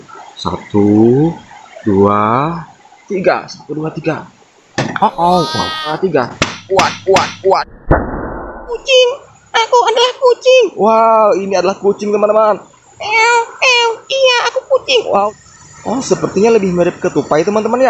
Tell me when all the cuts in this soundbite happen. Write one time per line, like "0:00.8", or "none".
0:05.9
0:08.8
0:15.3